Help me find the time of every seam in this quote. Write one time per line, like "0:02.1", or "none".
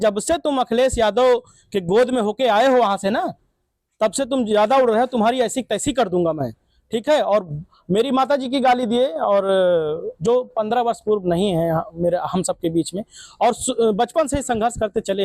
none